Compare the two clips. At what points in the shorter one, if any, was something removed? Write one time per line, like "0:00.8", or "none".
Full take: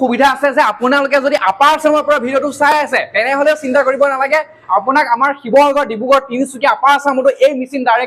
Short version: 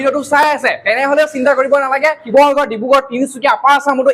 0:02.2